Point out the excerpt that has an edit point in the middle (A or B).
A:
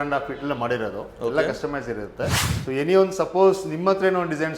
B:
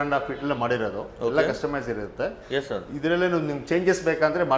A